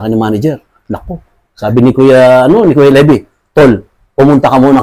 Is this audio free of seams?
yes; 0 cuts

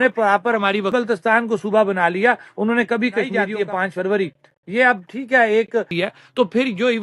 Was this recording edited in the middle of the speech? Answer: yes; 3 cuts; at 0.9 s, 3.4 s, 5.9 s

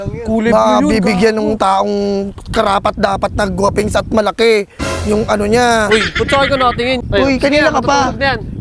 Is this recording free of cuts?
no; 1 cut; at 7.0 s

